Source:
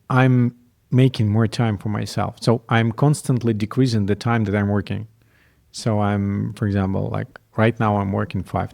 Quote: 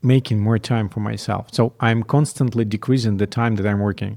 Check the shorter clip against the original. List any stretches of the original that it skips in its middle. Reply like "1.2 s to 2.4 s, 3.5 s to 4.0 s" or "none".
none